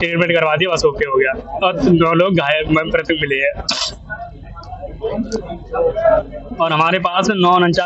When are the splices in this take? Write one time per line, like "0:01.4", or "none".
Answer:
none